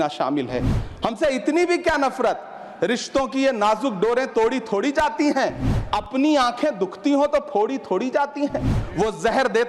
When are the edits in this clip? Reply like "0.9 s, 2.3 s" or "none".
8.8 s